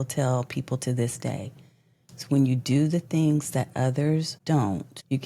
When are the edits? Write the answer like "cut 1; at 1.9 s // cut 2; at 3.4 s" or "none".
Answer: cut 1; at 4.3 s